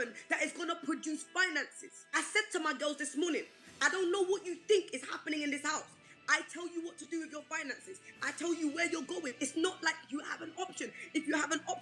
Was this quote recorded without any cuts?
yes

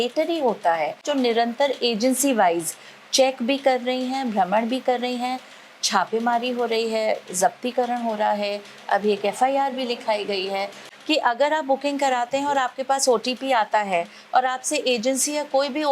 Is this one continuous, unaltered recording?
no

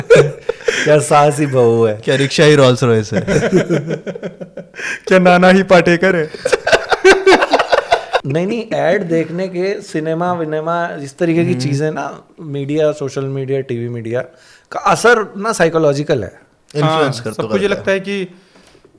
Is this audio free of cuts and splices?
no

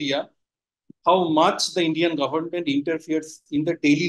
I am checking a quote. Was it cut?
no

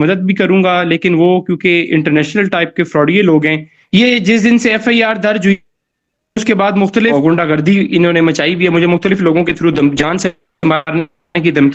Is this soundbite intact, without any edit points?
no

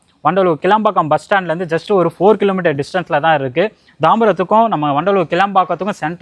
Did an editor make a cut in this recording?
no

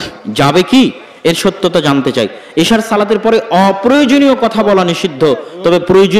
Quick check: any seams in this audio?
no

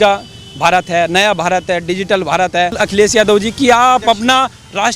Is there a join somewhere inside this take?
yes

